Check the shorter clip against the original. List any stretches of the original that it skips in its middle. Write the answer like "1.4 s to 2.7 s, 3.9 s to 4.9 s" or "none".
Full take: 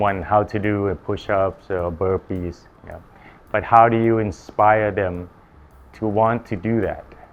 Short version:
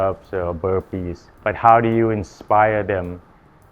2.6 s to 3.3 s